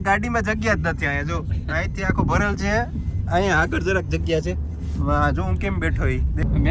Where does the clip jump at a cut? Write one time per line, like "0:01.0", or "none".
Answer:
none